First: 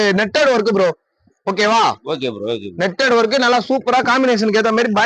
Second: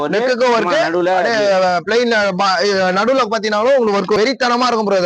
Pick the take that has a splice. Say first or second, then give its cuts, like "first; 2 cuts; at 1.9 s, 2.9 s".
second; 1 cut; at 4.2 s